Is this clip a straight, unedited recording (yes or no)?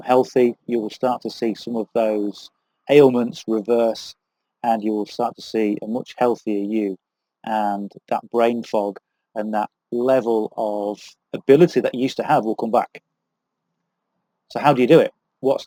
yes